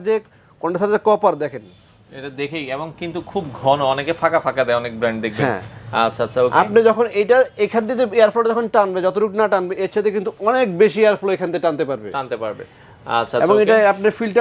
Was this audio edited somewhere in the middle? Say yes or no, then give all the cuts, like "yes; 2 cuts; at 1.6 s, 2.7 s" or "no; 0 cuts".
no; 0 cuts